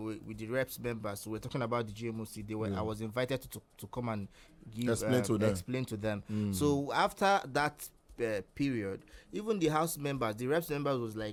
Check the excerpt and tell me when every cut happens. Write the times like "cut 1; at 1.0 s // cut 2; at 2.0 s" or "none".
none